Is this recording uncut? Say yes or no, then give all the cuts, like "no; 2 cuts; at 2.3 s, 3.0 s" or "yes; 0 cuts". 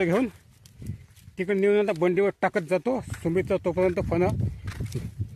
yes; 0 cuts